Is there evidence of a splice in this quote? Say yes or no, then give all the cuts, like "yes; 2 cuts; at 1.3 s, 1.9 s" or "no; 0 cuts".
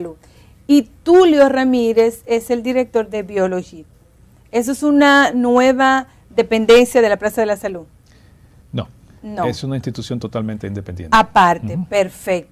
yes; 1 cut; at 7.3 s